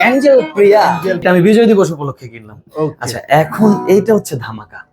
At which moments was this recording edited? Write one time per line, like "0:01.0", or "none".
0:01.2